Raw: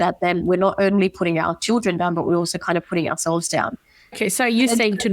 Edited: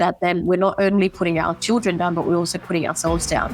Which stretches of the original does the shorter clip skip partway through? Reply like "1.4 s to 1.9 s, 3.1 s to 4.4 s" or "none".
2.6 s to 2.8 s